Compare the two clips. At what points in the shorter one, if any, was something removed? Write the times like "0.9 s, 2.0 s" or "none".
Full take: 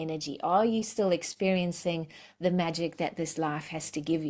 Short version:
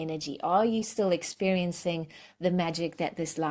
none